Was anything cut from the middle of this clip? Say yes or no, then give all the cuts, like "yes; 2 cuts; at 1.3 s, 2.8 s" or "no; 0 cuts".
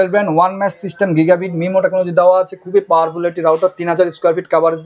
no; 0 cuts